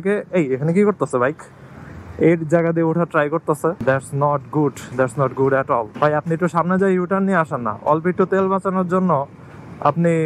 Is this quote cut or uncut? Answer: cut